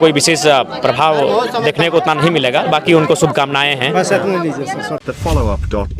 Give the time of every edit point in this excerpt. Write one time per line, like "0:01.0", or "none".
none